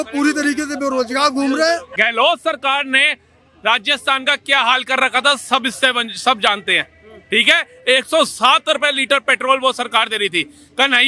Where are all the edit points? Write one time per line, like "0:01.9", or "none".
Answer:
0:01.9